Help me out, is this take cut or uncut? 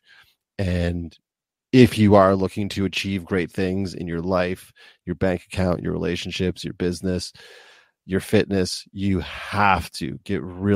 uncut